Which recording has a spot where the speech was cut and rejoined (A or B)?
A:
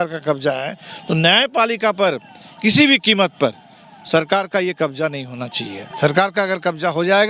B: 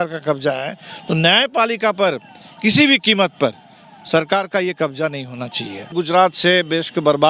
B